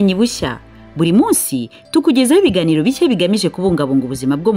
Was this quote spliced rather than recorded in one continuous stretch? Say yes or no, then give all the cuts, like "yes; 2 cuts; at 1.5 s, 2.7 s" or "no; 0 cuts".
no; 0 cuts